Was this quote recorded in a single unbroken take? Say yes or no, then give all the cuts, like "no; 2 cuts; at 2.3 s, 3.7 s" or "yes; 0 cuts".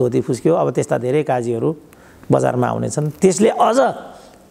yes; 0 cuts